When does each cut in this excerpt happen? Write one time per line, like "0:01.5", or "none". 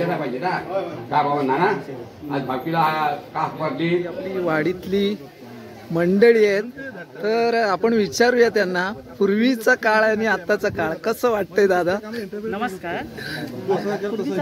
0:04.3